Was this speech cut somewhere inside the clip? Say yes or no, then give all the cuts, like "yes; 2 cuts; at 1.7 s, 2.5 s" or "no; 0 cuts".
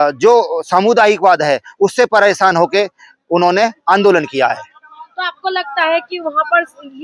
no; 0 cuts